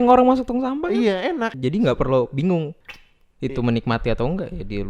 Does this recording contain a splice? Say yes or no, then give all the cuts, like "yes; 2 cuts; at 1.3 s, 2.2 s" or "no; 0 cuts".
yes; 2 cuts; at 1.6 s, 2.8 s